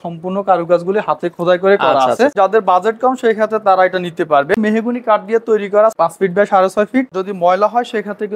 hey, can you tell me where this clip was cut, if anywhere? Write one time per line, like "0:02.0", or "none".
0:02.3
0:04.6
0:05.9
0:07.1